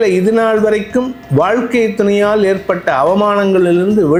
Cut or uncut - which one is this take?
uncut